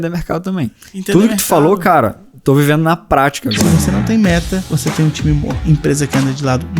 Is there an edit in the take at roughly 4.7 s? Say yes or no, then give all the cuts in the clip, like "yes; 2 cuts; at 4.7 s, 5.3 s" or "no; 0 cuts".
yes; 3 cuts; at 3.6 s, 4.7 s, 5.5 s